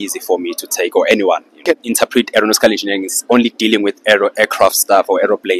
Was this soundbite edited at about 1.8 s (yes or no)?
yes